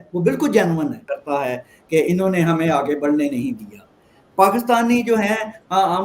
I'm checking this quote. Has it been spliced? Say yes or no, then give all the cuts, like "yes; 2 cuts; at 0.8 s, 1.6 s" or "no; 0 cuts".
yes; 1 cut; at 1.1 s